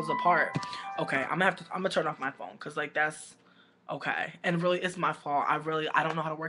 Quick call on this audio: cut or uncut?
cut